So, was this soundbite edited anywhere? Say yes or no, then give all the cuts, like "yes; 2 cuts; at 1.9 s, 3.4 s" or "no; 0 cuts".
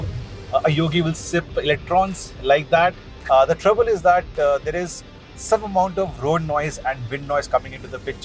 yes; 1 cut; at 3.1 s